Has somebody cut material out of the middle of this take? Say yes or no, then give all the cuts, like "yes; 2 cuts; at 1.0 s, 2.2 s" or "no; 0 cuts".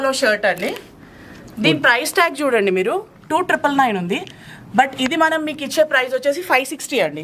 no; 0 cuts